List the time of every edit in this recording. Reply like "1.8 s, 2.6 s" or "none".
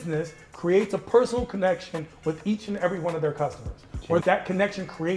4.2 s